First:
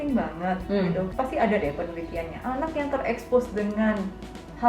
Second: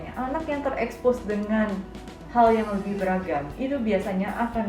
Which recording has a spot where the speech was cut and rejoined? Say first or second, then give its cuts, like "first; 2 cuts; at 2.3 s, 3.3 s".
first; 1 cut; at 1.1 s